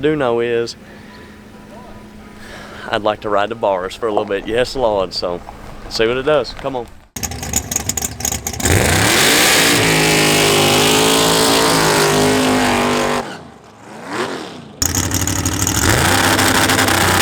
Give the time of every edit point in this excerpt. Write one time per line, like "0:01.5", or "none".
0:07.1
0:14.8